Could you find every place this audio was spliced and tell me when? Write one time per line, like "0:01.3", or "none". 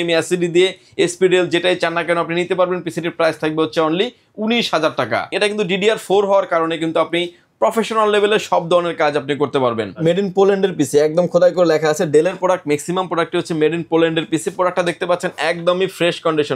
0:05.3
0:09.9